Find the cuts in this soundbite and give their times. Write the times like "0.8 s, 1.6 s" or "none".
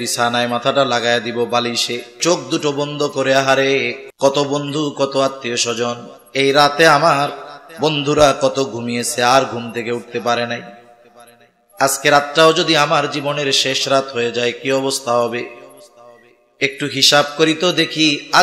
2.2 s, 4.0 s